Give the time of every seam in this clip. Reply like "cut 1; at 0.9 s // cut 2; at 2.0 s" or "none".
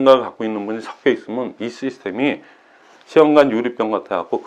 none